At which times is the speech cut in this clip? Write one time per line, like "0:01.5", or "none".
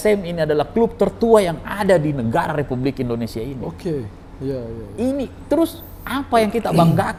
none